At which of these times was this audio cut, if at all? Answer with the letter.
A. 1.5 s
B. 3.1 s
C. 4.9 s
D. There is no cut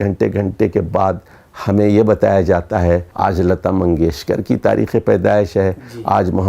B